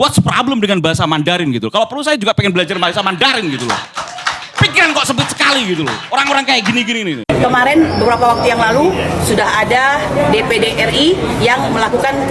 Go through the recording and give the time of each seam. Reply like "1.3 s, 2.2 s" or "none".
7.1 s